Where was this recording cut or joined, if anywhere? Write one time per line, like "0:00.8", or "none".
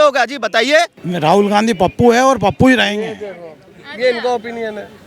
0:01.0